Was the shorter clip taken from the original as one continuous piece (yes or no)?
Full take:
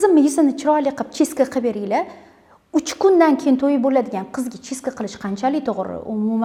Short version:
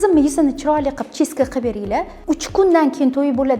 no